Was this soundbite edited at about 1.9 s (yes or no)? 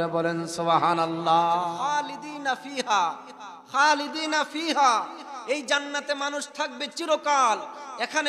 yes